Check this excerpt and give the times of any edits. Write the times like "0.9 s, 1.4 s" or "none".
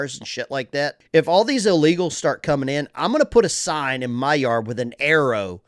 1.0 s